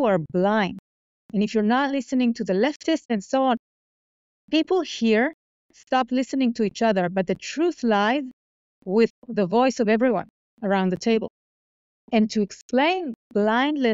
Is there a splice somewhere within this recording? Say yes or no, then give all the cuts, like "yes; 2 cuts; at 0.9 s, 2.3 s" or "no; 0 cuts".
yes; 2 cuts; at 3.1 s, 9.2 s